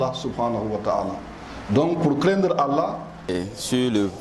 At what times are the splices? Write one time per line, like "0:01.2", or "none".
0:03.2